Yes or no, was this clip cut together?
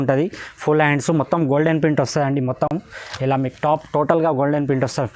no